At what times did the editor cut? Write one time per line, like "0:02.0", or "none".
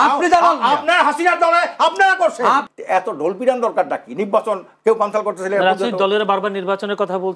0:02.7